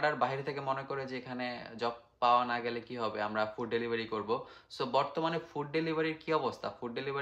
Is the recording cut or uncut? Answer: uncut